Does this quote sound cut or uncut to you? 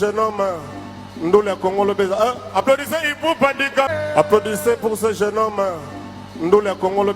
cut